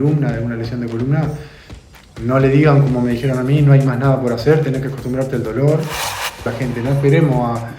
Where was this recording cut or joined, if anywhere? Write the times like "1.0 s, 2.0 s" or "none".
6.5 s